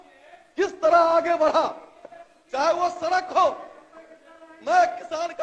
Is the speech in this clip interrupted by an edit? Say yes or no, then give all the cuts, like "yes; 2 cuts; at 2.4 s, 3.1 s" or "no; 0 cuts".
no; 0 cuts